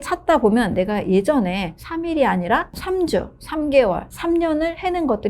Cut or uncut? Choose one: cut